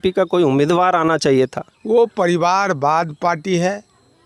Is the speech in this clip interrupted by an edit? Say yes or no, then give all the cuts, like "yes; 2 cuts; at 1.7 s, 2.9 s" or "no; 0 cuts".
yes; 1 cut; at 1.7 s